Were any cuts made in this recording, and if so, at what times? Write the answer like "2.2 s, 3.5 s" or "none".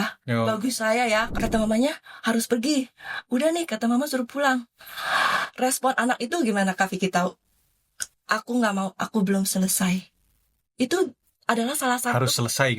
1.3 s